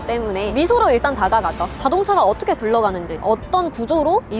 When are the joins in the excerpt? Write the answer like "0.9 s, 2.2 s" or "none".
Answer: 1.7 s